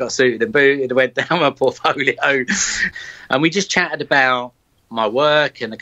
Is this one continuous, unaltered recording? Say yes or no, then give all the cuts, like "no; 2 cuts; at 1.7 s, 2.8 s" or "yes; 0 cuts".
no; 1 cut; at 2.9 s